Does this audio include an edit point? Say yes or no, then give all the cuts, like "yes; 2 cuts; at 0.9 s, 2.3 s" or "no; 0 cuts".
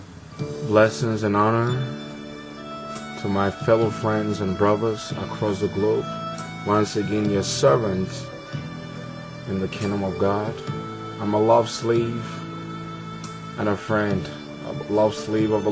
no; 0 cuts